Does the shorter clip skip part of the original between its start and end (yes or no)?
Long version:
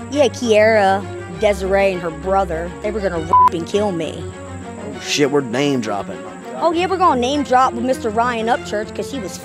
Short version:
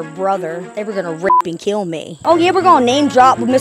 yes